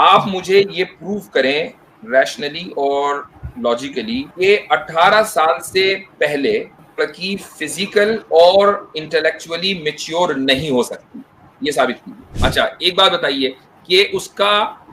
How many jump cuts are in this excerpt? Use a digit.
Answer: 3